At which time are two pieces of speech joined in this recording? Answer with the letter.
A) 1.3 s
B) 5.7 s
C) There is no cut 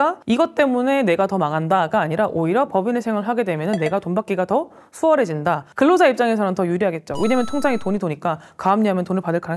B